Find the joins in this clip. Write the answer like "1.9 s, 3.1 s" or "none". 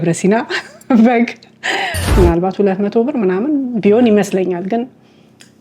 2.1 s